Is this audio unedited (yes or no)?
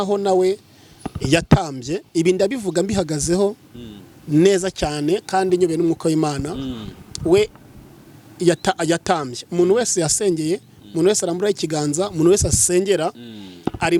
yes